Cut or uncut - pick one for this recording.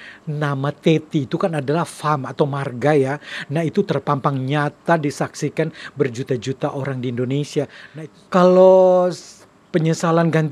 cut